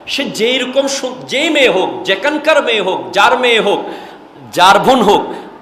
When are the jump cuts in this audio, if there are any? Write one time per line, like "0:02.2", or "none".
none